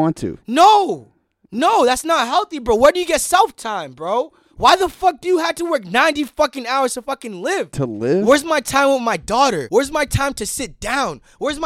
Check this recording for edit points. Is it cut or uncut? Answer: cut